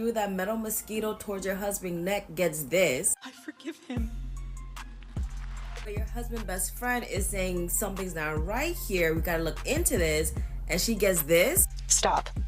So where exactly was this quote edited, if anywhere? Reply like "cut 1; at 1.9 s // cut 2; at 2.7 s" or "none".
none

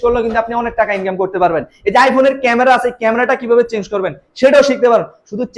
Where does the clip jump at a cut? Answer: none

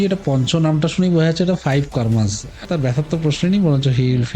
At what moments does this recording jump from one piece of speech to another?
cut 1; at 2.7 s

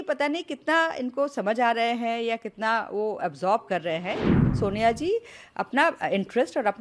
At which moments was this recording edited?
cut 1; at 4.5 s

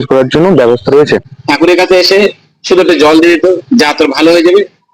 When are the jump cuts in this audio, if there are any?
cut 1; at 1.2 s

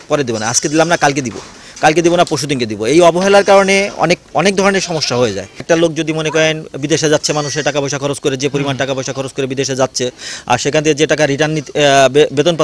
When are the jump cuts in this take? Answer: cut 1; at 5.6 s

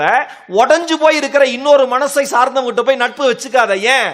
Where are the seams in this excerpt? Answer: none

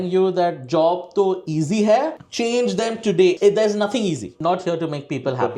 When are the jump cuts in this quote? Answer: cut 1; at 2.2 s // cut 2; at 3.4 s // cut 3; at 4.3 s

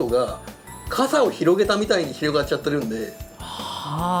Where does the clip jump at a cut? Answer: none

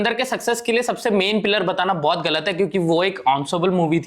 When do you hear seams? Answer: none

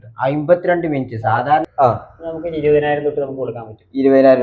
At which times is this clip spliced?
cut 1; at 1.7 s

